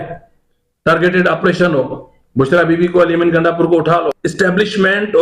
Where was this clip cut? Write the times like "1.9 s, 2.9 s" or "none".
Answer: 4.2 s